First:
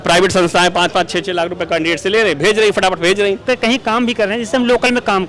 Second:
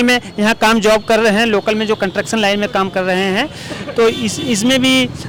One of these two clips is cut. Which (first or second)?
first